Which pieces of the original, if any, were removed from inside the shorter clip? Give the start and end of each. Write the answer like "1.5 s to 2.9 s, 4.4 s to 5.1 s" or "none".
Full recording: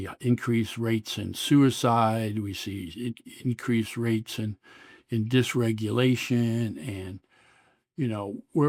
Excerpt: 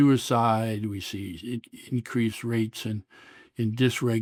none

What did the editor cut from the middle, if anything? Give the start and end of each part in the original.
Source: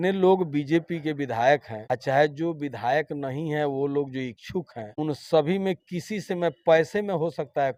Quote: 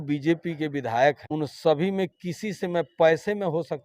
1.7 s to 4.9 s

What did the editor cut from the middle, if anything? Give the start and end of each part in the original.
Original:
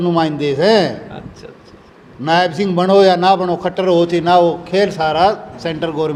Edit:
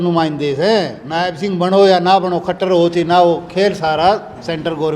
1.0 s to 2.2 s

